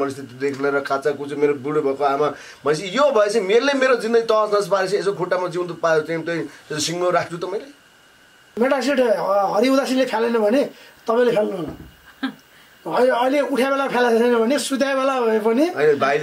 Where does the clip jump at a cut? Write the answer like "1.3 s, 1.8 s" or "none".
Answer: 8.5 s